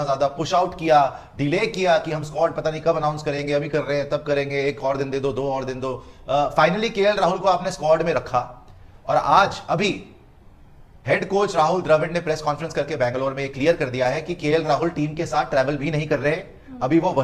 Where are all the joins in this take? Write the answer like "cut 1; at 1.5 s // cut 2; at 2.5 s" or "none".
none